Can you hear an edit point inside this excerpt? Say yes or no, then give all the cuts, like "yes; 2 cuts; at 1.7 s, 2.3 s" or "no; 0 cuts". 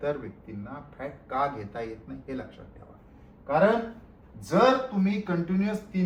no; 0 cuts